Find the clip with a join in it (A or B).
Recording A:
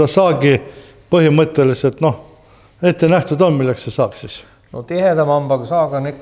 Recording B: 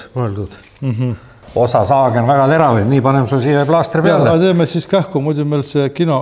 B